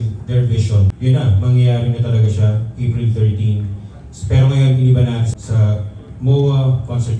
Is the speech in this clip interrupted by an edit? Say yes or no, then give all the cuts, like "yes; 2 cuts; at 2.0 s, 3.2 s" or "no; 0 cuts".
yes; 2 cuts; at 0.9 s, 5.3 s